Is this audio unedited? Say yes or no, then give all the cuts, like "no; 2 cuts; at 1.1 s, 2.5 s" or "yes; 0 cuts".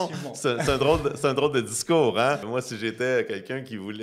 no; 1 cut; at 2.5 s